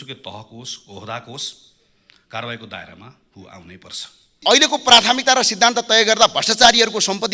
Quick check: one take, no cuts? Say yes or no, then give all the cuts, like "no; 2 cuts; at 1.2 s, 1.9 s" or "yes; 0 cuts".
no; 1 cut; at 4.4 s